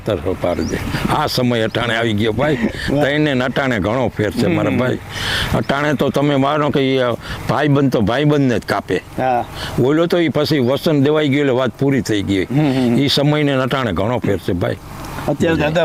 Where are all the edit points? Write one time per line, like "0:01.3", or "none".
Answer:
none